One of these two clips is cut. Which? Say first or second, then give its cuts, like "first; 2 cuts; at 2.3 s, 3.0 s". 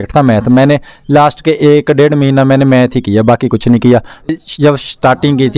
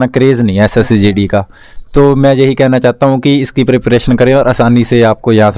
first; 1 cut; at 4.3 s